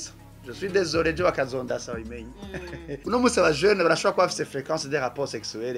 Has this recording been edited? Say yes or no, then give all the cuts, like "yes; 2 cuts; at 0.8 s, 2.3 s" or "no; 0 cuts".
yes; 1 cut; at 2.9 s